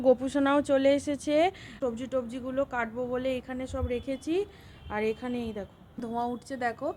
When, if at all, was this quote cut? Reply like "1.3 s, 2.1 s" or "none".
1.8 s, 6.1 s